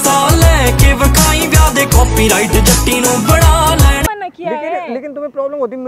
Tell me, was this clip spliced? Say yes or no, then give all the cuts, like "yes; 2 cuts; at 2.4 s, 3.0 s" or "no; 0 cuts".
yes; 1 cut; at 4.1 s